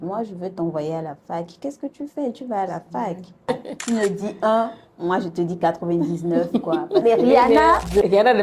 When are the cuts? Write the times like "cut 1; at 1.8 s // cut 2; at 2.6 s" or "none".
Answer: cut 1; at 3.5 s // cut 2; at 7.0 s